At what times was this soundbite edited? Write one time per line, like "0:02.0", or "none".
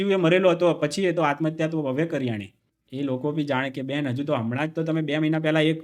0:02.8